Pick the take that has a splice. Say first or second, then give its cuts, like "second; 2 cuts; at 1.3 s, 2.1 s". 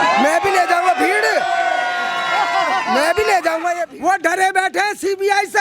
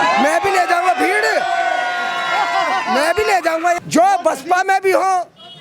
first; 1 cut; at 3.8 s